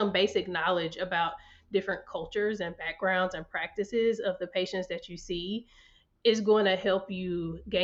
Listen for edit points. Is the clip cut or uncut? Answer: uncut